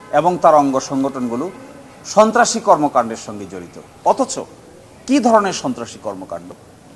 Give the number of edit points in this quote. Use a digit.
0